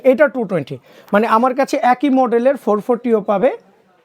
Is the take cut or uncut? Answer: uncut